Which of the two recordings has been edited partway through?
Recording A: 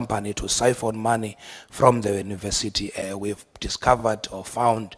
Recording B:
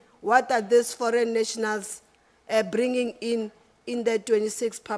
A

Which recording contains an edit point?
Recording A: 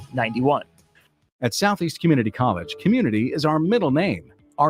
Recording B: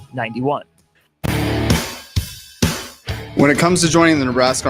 B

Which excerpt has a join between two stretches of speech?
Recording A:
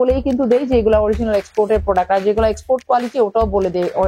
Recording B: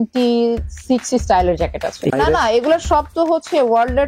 B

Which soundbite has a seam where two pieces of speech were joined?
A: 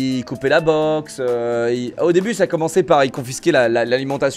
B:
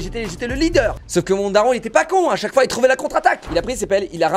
B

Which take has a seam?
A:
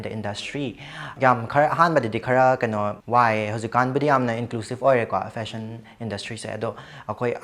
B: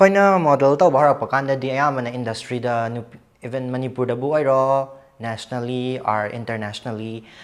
A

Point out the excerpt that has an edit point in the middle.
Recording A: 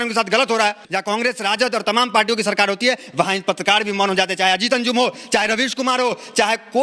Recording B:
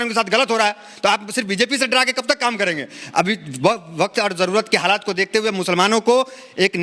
A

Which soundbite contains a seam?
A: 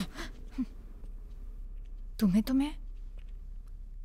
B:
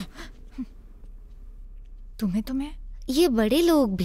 B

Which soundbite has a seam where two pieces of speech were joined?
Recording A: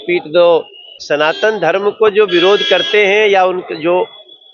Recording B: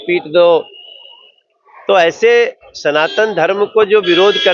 A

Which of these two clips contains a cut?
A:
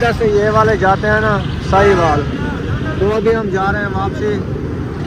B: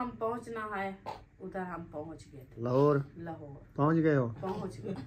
B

